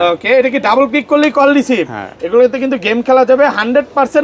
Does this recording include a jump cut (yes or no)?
no